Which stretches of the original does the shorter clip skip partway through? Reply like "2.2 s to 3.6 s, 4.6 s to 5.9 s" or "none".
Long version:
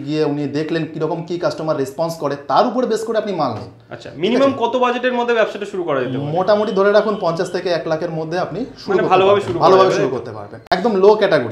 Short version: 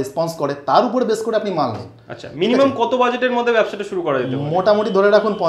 none